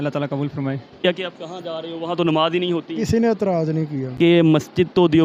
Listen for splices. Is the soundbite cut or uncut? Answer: cut